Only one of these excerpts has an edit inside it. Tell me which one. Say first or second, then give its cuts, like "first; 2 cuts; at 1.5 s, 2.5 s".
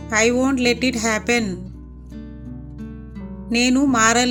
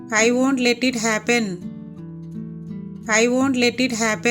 second; 2 cuts; at 1.6 s, 3.1 s